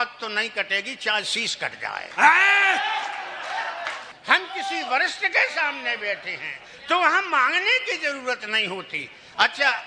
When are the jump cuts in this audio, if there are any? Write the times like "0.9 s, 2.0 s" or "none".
4.1 s